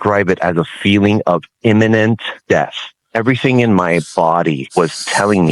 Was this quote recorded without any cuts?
no; 2 cuts; at 2.7 s, 4.6 s

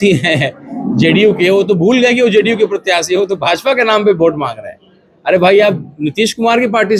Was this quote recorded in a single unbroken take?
yes; 0 cuts

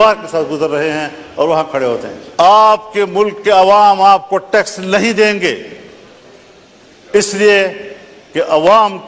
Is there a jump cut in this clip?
yes; 1 cut; at 2.2 s

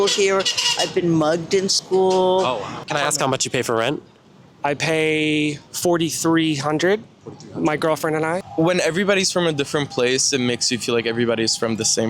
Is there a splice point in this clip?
yes; 3 cuts; at 2.7 s, 5.7 s, 8.4 s

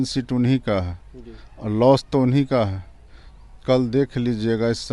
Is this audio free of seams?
yes; 0 cuts

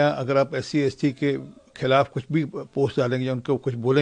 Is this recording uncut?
yes; 0 cuts

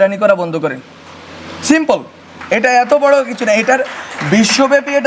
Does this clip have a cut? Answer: no; 0 cuts

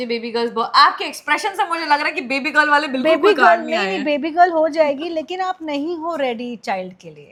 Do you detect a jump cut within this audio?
no; 0 cuts

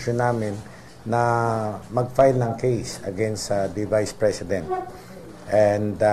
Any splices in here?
no; 0 cuts

